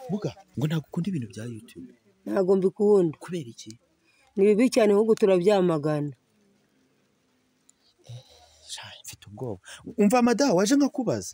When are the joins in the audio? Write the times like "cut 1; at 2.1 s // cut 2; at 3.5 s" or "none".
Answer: none